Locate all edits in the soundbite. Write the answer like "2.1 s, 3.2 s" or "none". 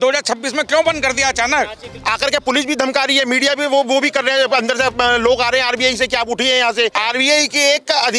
2.0 s, 7.0 s